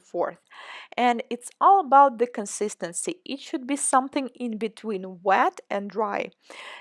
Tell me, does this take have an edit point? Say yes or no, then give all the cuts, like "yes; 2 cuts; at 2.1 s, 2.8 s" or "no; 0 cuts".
no; 0 cuts